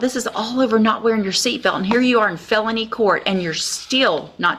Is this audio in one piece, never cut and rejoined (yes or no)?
yes